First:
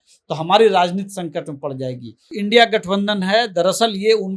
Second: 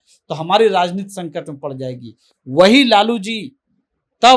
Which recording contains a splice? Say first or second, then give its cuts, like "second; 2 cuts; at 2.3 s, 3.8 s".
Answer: first; 1 cut; at 2.3 s